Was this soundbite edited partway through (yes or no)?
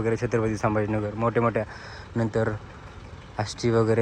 no